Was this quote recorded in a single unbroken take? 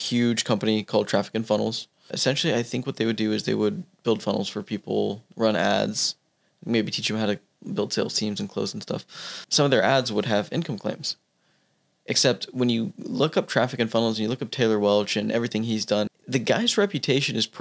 no; 3 cuts; at 2.1 s, 9.4 s, 16.1 s

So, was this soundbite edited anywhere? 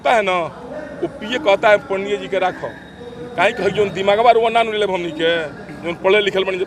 no; 0 cuts

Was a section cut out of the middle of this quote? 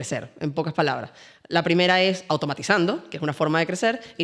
no; 0 cuts

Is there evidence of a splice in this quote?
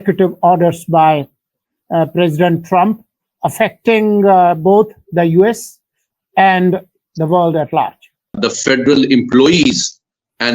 yes; 1 cut; at 8.3 s

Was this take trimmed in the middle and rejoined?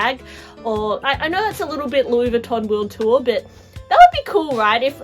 yes; 1 cut; at 1.0 s

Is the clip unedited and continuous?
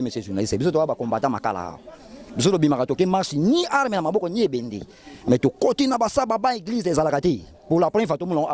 yes; 0 cuts

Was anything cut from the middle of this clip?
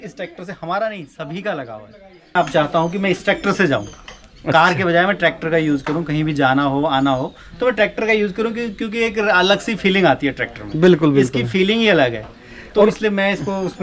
yes; 1 cut; at 2.3 s

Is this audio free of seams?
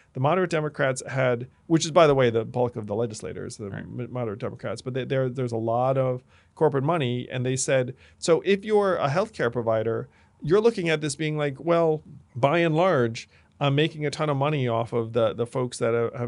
yes; 0 cuts

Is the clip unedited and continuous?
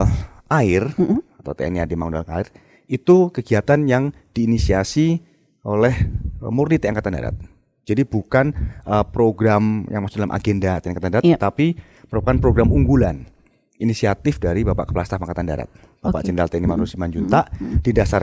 yes; 0 cuts

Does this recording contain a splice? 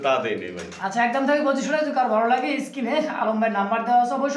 no; 0 cuts

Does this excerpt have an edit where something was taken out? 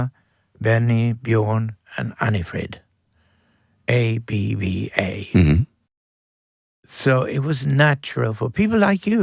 no; 0 cuts

